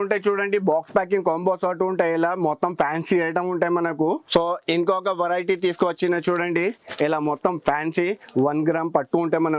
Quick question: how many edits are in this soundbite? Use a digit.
1